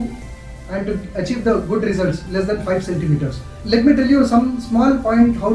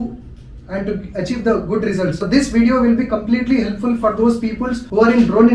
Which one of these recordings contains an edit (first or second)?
second